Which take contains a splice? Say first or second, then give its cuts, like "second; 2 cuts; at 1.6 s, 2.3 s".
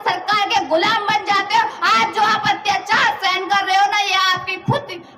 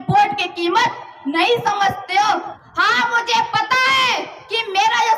second; 1 cut; at 2.5 s